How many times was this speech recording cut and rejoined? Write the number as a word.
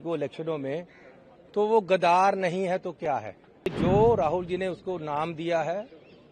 one